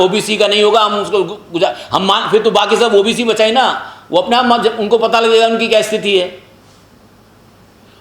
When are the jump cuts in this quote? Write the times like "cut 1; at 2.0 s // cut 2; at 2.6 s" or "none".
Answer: none